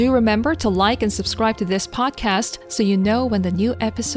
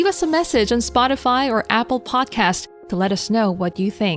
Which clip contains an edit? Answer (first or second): first